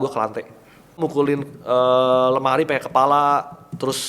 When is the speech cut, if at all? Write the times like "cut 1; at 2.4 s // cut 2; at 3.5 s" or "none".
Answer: cut 1; at 1.0 s